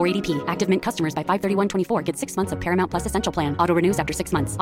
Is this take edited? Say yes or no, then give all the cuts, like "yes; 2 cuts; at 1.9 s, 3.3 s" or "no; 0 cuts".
no; 0 cuts